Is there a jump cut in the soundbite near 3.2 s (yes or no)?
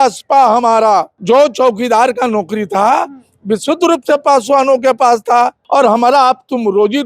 no